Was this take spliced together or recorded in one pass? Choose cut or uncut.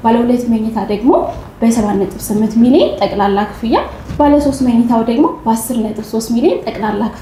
uncut